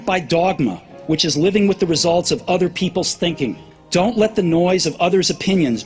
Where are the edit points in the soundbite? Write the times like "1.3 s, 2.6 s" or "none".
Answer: 3.7 s